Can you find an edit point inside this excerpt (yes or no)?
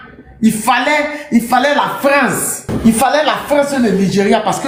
no